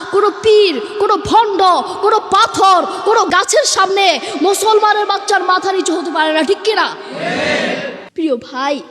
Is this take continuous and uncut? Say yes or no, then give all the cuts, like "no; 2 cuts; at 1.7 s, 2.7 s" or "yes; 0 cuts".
no; 1 cut; at 8.0 s